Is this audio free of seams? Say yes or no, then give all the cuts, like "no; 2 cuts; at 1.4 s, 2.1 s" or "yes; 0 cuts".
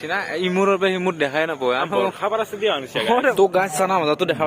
no; 1 cut; at 3.3 s